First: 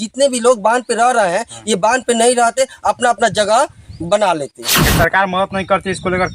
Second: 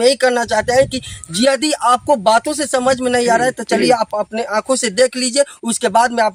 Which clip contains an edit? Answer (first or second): first